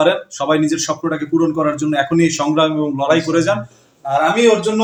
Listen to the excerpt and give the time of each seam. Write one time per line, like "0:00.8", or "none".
none